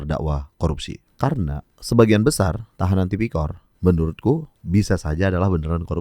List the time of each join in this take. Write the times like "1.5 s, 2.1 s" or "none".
1.0 s, 1.7 s, 2.7 s, 3.6 s, 4.5 s